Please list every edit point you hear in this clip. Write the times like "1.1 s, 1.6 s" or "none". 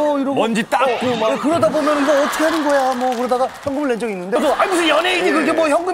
4.4 s

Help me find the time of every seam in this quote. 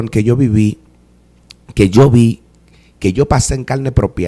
none

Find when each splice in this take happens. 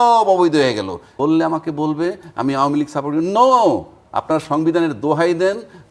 1.1 s

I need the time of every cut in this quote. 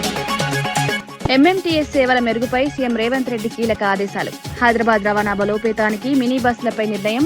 1.1 s

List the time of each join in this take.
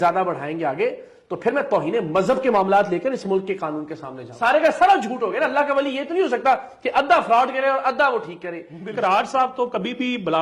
4.3 s, 8.9 s

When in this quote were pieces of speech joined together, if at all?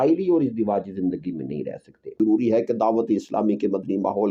2.2 s

